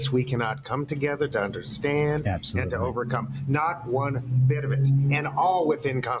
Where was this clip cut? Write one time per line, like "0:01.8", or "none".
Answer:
none